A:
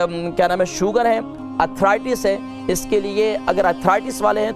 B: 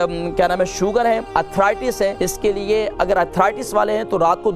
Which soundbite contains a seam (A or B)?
B